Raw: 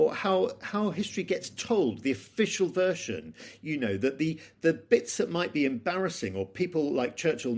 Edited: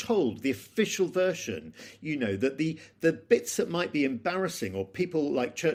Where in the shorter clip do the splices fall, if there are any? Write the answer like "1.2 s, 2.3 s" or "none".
none